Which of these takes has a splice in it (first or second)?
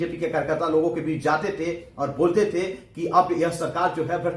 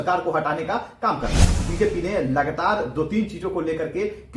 second